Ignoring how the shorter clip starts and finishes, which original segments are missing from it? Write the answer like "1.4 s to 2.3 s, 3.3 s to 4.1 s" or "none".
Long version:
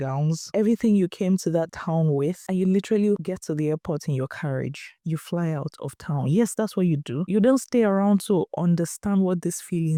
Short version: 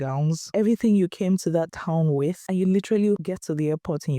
none